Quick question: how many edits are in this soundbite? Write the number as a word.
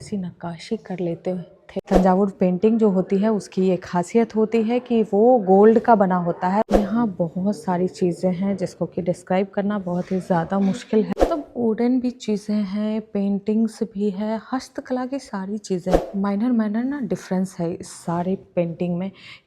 four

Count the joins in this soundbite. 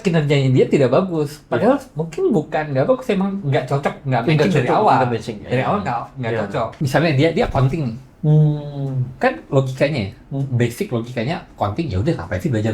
one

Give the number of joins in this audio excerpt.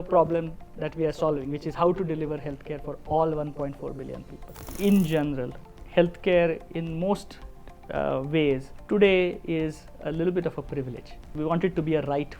three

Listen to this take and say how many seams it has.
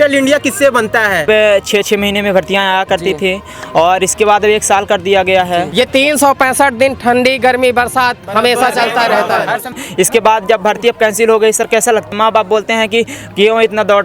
four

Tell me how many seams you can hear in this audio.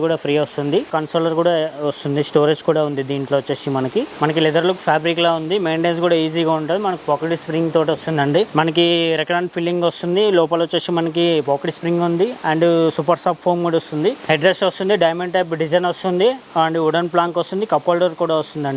four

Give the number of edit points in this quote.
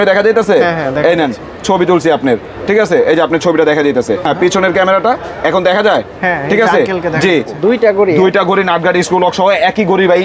two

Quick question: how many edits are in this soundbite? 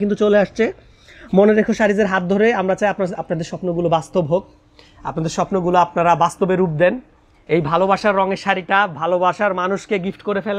zero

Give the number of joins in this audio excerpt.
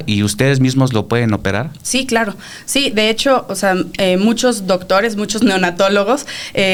zero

